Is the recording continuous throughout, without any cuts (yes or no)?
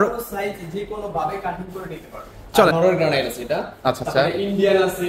no